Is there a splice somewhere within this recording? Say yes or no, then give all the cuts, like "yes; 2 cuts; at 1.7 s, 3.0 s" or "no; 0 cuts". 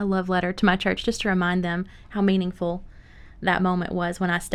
no; 0 cuts